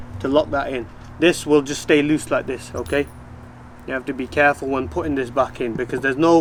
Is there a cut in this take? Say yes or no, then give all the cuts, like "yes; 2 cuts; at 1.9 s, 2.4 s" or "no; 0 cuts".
no; 0 cuts